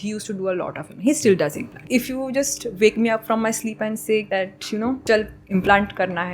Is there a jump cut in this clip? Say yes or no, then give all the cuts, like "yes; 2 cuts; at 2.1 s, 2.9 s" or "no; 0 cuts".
yes; 2 cuts; at 1.8 s, 4.7 s